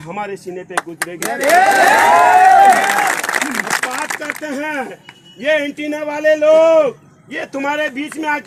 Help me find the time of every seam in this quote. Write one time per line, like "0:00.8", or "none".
none